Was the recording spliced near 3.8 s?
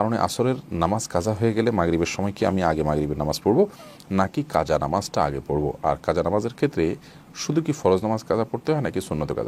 no; 0 cuts

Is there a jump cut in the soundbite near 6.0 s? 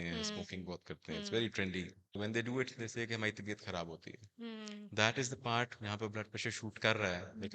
no; 1 cut; at 2.2 s

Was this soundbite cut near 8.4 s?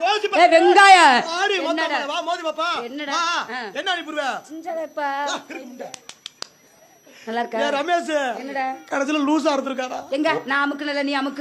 no; 0 cuts

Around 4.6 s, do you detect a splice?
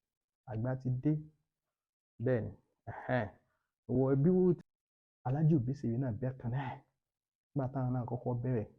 yes; 1 cut; at 4.6 s

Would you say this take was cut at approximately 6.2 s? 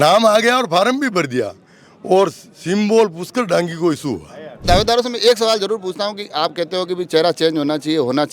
no; 1 cut; at 4.7 s

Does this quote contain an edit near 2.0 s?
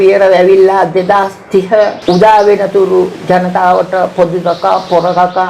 yes; 1 cut; at 2.0 s

